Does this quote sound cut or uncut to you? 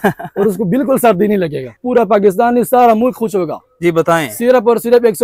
cut